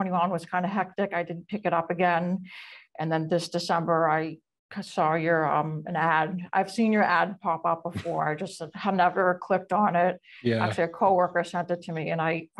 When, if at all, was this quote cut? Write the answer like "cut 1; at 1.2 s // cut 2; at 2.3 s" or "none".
none